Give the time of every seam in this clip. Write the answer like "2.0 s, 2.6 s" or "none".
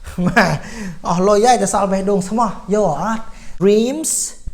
3.6 s

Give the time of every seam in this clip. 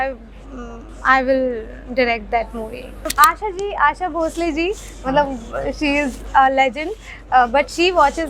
3.1 s

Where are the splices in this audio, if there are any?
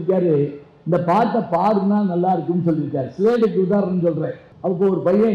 4.4 s

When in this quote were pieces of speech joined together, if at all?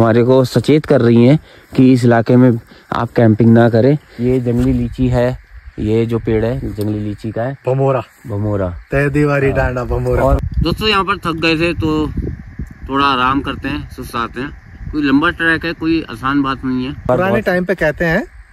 4.1 s, 10.4 s, 17.1 s

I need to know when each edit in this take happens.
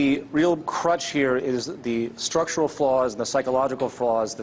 2.2 s

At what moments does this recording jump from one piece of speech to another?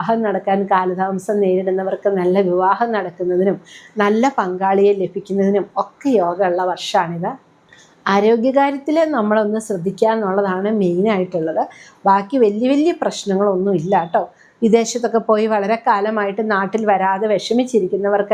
none

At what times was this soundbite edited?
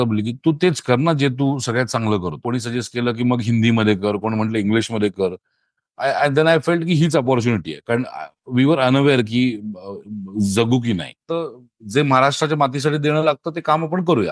2.4 s, 11.3 s

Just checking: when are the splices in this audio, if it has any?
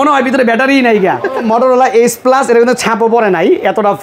1.4 s

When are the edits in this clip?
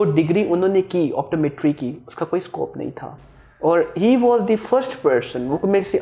none

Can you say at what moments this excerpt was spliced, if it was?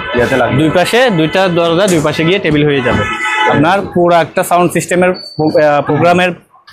none

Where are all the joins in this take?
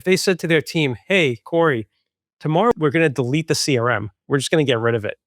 2.7 s, 4.2 s

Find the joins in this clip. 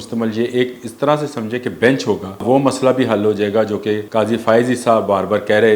2.4 s, 4.0 s

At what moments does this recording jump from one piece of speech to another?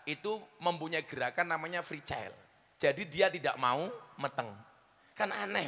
none

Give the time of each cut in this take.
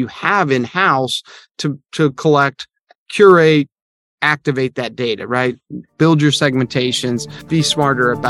7.4 s

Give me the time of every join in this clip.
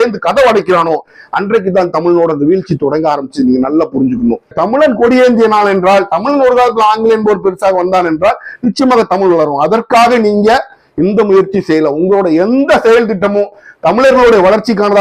4.6 s

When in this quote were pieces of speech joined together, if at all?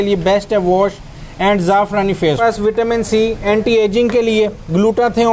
2.4 s

